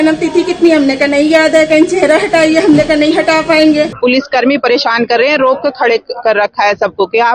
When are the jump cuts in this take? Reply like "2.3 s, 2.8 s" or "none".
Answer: 3.9 s